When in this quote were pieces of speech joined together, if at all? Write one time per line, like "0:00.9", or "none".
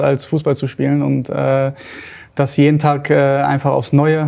none